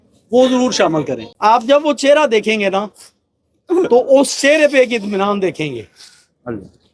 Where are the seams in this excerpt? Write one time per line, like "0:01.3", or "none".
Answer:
0:01.2